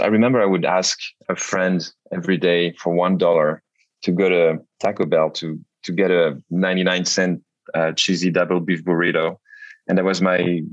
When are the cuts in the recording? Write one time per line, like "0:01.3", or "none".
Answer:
none